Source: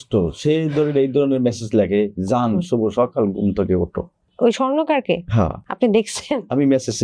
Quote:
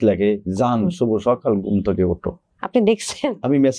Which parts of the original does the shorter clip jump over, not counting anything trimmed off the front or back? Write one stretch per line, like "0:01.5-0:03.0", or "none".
0:04.2-0:05.6